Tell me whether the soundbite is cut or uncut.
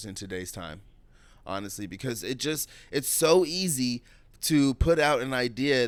uncut